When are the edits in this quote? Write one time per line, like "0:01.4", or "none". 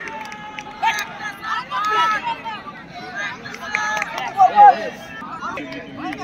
0:05.1